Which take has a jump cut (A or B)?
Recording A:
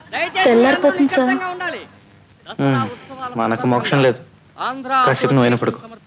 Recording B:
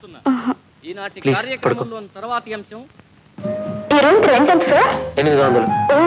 B